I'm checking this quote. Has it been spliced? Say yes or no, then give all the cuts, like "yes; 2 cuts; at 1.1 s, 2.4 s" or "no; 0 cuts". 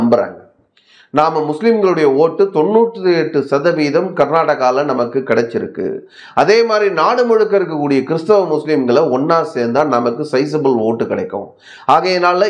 no; 0 cuts